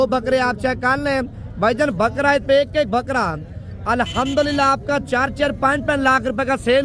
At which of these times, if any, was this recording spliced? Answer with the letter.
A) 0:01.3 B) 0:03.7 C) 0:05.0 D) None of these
D